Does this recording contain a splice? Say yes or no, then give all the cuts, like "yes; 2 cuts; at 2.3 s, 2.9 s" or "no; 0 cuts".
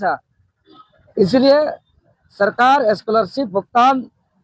no; 0 cuts